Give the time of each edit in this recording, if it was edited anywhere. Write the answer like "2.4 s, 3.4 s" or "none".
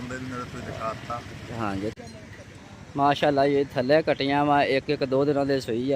1.9 s